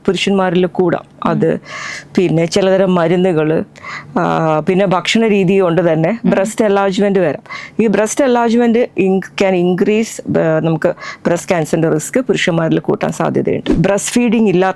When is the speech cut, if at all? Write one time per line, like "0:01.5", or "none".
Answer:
0:13.8